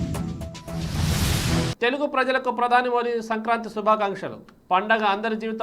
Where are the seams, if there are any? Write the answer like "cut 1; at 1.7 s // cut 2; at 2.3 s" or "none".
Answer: none